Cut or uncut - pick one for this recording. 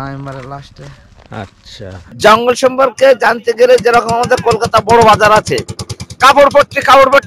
cut